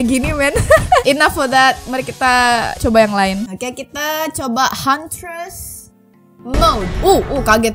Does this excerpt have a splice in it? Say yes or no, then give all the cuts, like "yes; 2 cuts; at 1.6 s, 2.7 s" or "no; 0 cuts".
no; 0 cuts